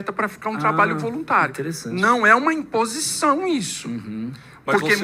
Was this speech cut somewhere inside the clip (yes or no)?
no